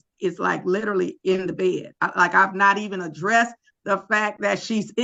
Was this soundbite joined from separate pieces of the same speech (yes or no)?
no